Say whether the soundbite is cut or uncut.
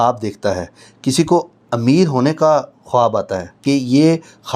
cut